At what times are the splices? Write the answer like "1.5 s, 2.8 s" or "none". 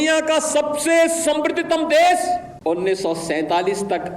2.5 s